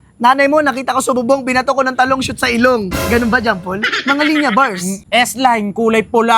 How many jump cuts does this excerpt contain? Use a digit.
1